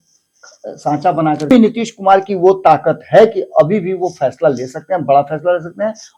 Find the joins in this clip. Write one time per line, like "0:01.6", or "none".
0:01.5